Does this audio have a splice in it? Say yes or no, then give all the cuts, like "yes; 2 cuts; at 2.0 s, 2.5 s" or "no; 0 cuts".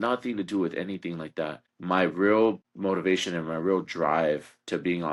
no; 0 cuts